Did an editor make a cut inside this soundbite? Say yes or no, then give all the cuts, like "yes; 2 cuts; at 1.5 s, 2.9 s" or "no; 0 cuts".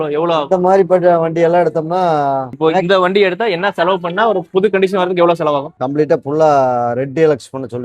yes; 2 cuts; at 2.5 s, 5.7 s